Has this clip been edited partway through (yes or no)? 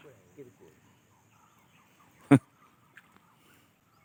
no